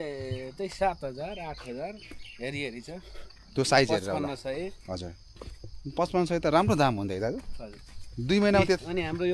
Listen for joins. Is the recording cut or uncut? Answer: uncut